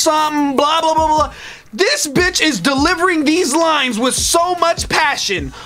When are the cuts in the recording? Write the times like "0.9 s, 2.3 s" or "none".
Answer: none